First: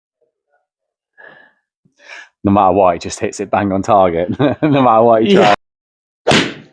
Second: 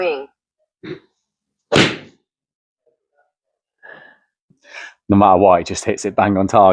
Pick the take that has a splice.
first; 1 cut; at 5.5 s

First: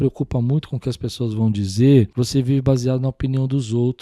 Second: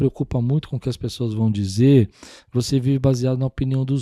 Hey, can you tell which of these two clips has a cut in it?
first; 1 cut; at 2.1 s

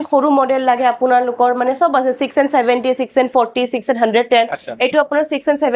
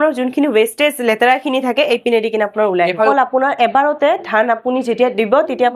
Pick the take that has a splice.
second; 1 cut; at 3.1 s

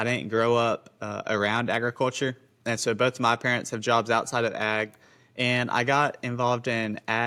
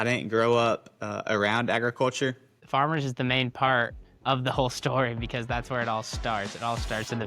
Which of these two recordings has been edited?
second; 1 cut; at 2.5 s

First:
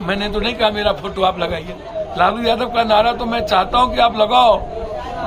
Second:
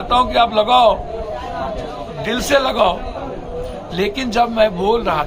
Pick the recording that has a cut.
first; 1 cut; at 1.9 s

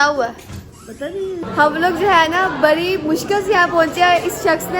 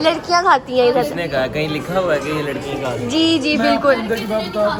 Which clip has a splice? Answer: first; 1 cut; at 1.4 s

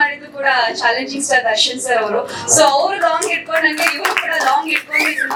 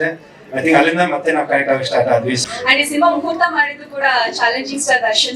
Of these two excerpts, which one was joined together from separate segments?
second; 1 cut; at 2.4 s

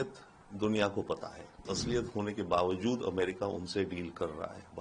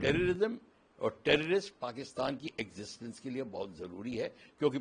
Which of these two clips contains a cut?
first; 1 cut; at 1.7 s

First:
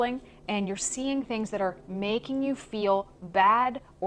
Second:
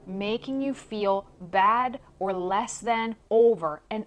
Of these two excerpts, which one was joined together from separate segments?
second; 1 cut; at 3.2 s

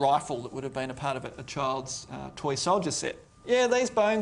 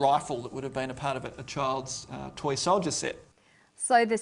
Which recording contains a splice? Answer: first; 1 cut; at 3.3 s

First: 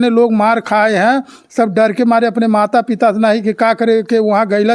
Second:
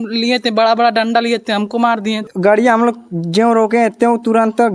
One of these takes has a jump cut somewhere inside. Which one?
second; 1 cut; at 2.2 s

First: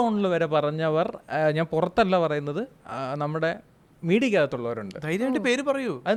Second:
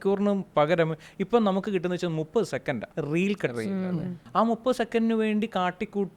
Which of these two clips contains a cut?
second; 2 cuts; at 2.9 s, 4.2 s

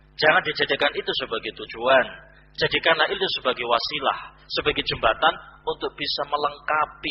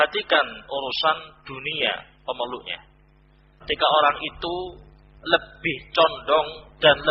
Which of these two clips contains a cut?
second; 1 cut; at 3.6 s

